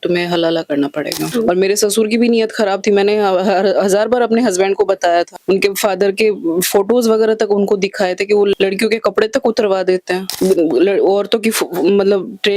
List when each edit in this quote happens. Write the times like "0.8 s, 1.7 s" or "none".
1.2 s, 8.6 s